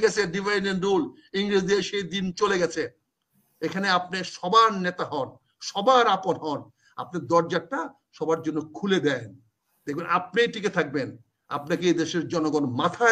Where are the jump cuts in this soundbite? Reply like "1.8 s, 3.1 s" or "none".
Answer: none